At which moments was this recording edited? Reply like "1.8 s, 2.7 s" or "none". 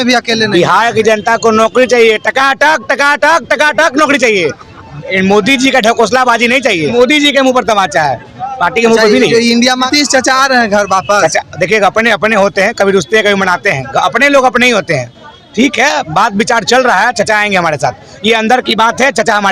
6.9 s, 9.9 s